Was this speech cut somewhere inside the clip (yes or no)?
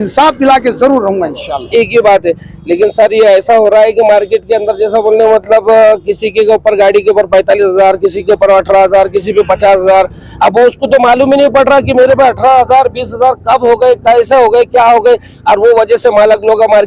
yes